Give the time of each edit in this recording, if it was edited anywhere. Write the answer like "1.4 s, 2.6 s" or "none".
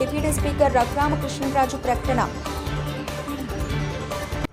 none